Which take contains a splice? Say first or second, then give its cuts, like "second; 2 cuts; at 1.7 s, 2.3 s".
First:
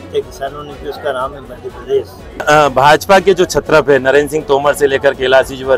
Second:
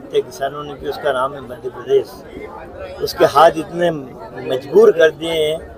first; 1 cut; at 2.4 s